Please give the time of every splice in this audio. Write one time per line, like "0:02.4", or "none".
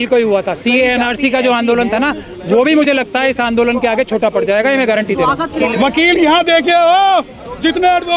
0:05.5